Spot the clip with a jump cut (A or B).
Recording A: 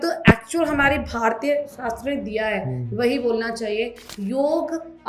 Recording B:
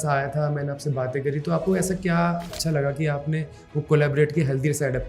B